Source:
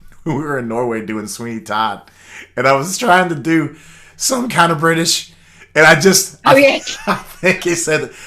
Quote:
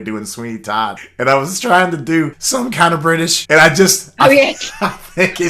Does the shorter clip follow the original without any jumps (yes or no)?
no